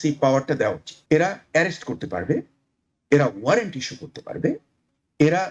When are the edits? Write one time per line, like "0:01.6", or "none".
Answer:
0:00.9